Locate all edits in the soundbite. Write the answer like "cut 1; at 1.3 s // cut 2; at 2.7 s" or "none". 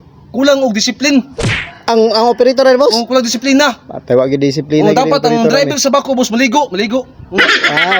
none